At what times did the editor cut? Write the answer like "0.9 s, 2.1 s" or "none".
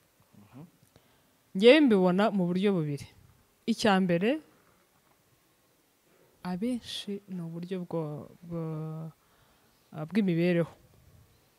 none

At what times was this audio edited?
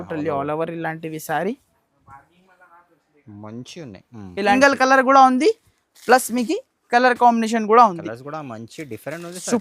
4.5 s

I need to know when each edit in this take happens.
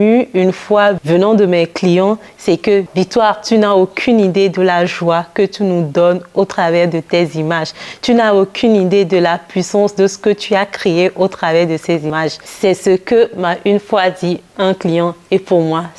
1.0 s, 2.9 s

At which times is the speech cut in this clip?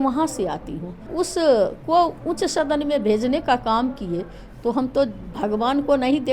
1.1 s

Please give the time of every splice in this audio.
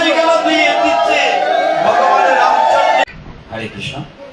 3.0 s

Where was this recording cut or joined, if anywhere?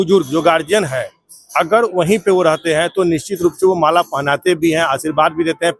none

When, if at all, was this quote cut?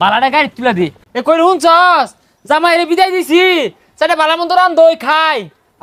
1.0 s

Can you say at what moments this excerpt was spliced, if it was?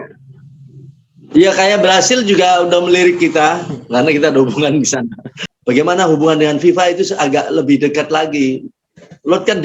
5.4 s

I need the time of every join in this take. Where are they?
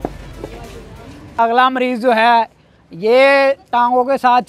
1.3 s

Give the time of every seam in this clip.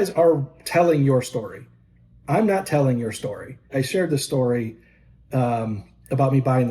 3.7 s

